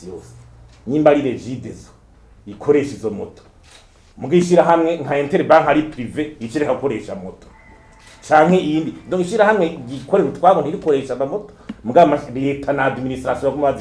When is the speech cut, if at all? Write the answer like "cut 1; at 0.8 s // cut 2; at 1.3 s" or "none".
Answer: none